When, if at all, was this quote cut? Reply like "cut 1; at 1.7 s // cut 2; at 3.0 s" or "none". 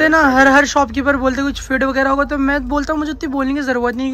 none